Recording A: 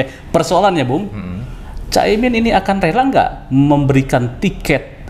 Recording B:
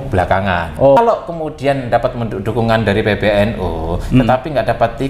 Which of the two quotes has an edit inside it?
B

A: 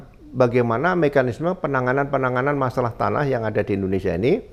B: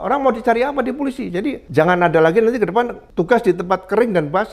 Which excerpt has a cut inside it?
B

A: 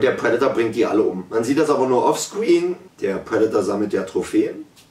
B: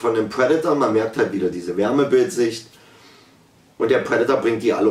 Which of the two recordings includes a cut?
A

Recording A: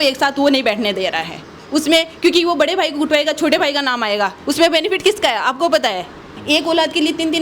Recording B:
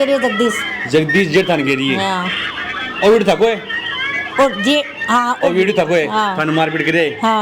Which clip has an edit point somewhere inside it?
A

